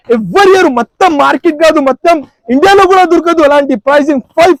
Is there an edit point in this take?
no; 0 cuts

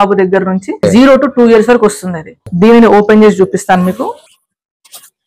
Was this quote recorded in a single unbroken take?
no; 2 cuts; at 0.8 s, 2.5 s

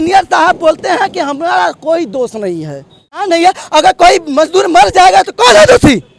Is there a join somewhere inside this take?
yes; 1 cut; at 3.1 s

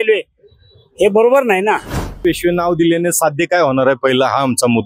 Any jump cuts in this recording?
yes; 1 cut; at 2.2 s

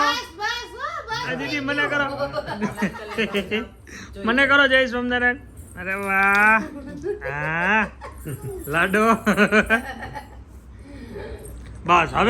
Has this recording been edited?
no; 0 cuts

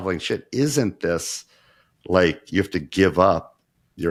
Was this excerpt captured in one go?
yes; 0 cuts

